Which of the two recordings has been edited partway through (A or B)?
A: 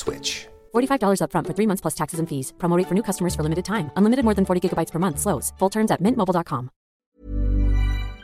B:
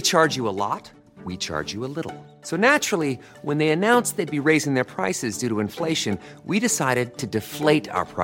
A